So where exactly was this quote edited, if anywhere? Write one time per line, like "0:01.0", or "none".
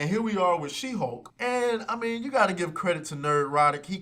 0:01.3